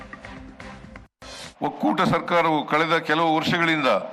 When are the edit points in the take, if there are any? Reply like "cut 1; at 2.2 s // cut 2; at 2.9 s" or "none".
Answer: none